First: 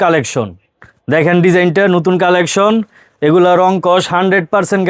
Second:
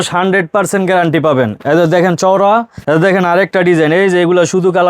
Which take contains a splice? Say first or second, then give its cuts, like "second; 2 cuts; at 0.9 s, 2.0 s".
second; 1 cut; at 2.7 s